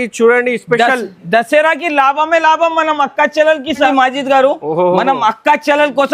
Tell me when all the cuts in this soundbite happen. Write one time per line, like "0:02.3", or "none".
0:03.9